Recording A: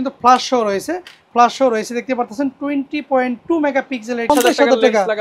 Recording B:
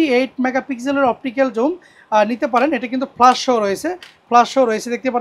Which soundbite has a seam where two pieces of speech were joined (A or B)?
A